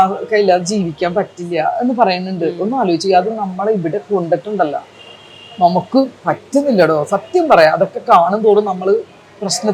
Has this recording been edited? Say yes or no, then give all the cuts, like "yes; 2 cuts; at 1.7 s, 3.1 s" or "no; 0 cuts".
no; 0 cuts